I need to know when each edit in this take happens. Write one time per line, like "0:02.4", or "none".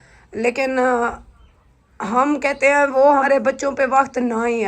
0:03.2